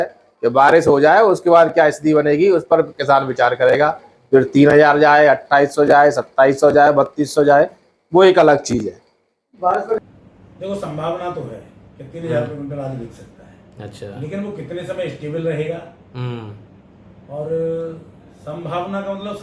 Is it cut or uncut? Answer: cut